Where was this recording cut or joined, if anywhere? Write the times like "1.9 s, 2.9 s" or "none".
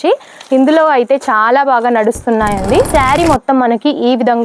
none